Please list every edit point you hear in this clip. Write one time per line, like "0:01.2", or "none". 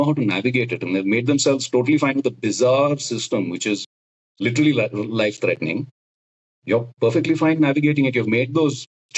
none